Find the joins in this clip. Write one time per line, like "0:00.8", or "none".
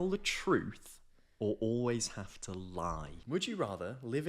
0:03.1